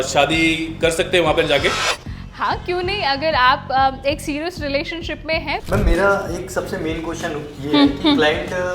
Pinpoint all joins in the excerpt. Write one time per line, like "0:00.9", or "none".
0:05.6